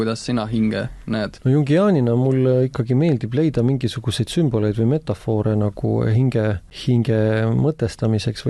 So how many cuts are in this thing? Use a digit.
2